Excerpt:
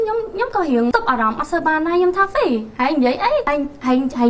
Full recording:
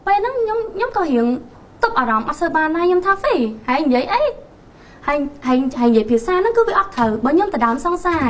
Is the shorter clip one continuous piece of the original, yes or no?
no